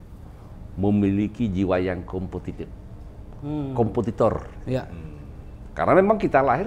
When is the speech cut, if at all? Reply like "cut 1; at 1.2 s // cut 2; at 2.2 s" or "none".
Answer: none